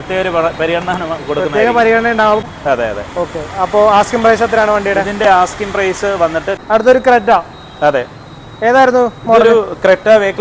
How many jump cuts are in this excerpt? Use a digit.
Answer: 2